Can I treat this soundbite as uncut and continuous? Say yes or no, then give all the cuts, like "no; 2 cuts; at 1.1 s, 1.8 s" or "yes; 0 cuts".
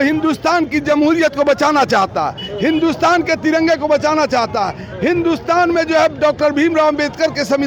yes; 0 cuts